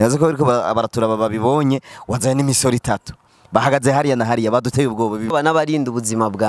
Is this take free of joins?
no; 1 cut; at 5.3 s

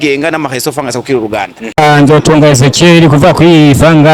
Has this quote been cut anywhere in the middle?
yes; 1 cut; at 1.6 s

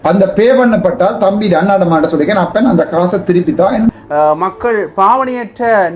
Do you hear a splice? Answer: yes; 1 cut; at 3.9 s

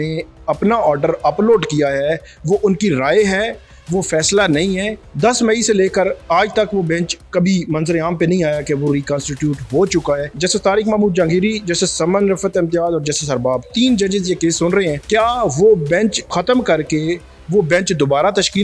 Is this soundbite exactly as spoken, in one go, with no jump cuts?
no; 4 cuts; at 5.0 s, 10.4 s, 15.0 s, 16.3 s

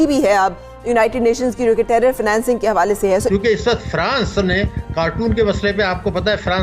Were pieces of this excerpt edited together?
yes; 1 cut; at 3.3 s

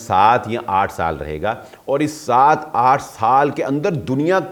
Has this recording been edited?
no; 0 cuts

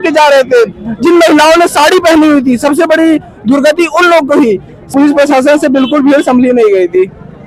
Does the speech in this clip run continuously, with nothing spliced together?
no; 1 cut; at 4.9 s

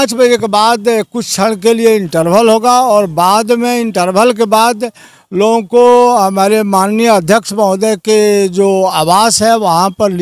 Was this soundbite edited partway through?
no; 0 cuts

